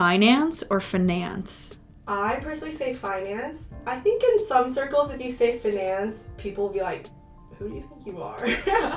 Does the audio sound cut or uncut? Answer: cut